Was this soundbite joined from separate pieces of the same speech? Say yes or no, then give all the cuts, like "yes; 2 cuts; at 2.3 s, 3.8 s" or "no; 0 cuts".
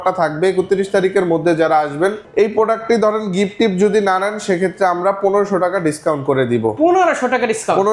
yes; 1 cut; at 2.2 s